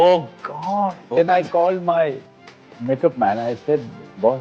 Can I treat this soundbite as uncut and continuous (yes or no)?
no